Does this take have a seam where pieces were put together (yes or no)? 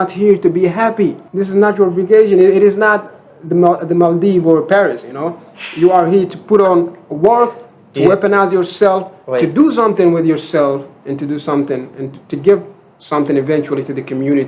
yes